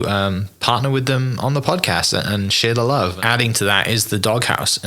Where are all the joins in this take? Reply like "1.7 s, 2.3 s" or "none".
3.2 s